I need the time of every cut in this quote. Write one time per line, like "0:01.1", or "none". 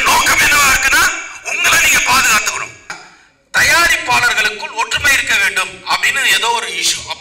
0:03.0